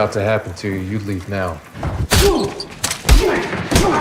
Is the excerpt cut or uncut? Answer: uncut